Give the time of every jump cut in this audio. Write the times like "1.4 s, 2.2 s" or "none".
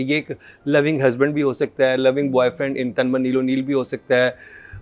none